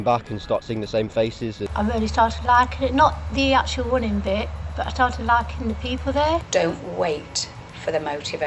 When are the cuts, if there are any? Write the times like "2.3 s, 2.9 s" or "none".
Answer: 1.6 s, 6.5 s